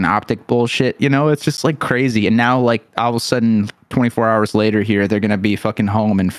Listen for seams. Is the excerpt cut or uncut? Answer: uncut